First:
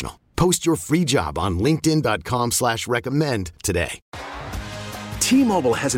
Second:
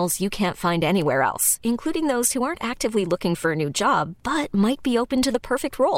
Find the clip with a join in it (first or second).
first